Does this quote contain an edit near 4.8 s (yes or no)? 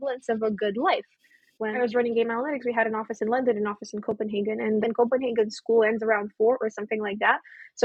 yes